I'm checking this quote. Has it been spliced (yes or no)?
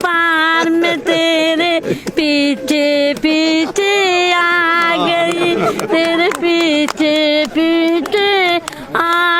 no